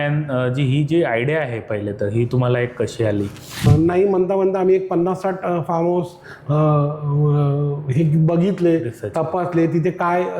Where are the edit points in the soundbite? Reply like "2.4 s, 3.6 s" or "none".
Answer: 3.5 s